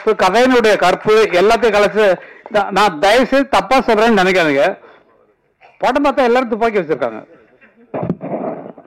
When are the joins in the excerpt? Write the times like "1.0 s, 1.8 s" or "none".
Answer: none